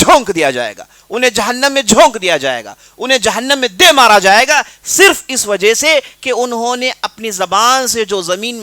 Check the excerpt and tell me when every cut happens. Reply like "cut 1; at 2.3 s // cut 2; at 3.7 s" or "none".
none